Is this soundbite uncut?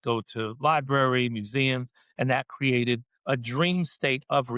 no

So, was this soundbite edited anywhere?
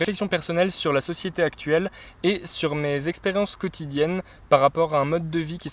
no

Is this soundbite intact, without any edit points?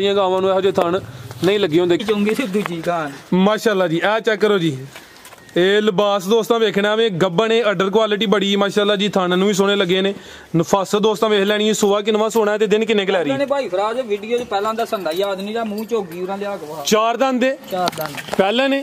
no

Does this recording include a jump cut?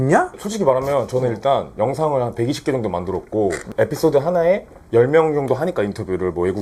no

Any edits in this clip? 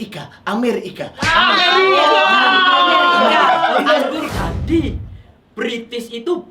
yes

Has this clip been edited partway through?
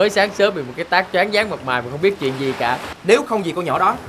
yes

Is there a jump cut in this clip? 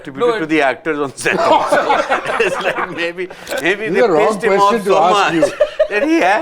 no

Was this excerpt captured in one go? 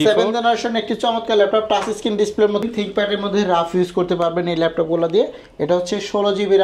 no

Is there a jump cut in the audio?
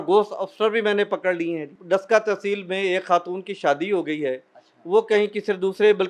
yes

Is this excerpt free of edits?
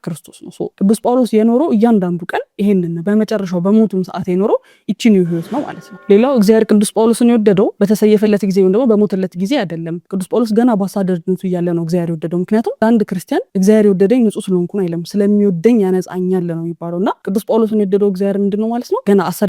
no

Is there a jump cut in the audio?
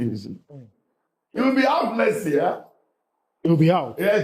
no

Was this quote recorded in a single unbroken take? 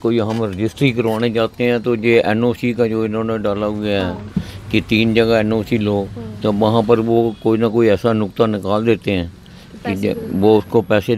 yes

